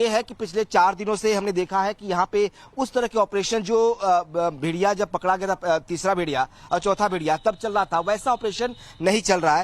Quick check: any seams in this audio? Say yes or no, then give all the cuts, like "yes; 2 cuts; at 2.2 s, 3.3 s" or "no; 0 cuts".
yes; 1 cut; at 7.7 s